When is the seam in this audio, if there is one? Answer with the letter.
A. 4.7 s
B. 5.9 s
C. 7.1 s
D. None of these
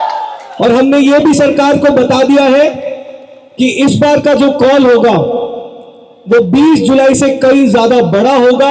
D